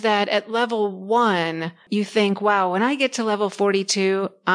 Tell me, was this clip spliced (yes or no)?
yes